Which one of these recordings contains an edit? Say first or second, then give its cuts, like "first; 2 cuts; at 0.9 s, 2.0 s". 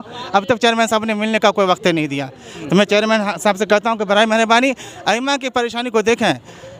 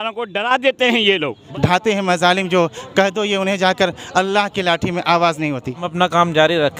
second; 2 cuts; at 1.4 s, 5.9 s